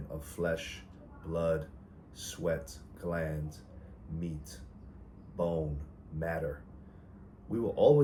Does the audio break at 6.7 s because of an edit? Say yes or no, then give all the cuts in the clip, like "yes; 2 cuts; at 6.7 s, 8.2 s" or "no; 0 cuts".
no; 0 cuts